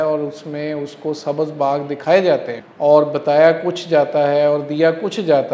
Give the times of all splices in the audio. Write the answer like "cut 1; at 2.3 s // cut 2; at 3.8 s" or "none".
cut 1; at 2.6 s